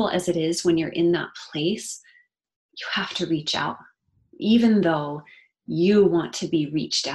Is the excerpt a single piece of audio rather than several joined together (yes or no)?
yes